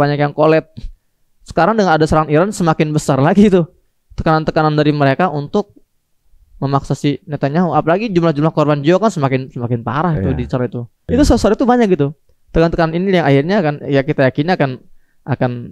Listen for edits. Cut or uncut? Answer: cut